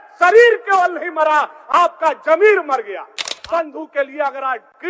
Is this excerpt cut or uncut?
cut